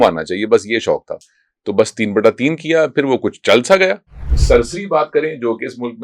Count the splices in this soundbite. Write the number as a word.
one